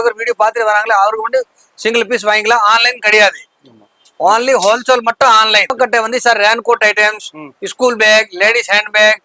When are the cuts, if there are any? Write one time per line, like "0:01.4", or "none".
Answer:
0:05.7